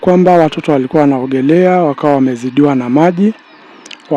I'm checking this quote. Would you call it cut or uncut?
uncut